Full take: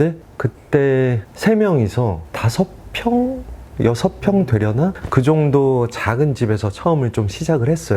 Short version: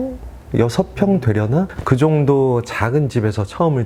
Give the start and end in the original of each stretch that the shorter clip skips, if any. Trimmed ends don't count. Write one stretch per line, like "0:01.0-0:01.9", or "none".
none